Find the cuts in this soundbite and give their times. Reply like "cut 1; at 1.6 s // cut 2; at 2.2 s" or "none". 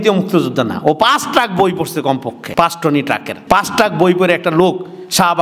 cut 1; at 2.4 s // cut 2; at 3.3 s